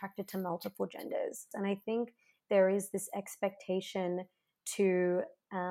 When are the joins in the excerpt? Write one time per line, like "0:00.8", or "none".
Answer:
0:01.5